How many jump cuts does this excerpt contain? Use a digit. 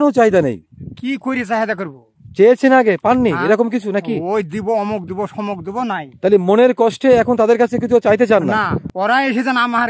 1